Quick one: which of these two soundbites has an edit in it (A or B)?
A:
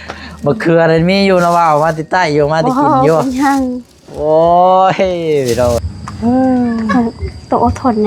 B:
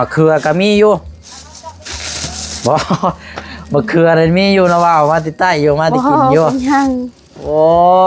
A